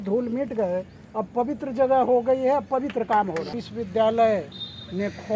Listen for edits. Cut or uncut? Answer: cut